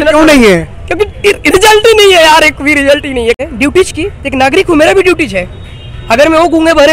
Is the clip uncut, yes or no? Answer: no